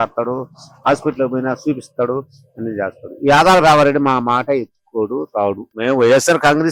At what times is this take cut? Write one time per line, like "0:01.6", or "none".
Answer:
0:05.8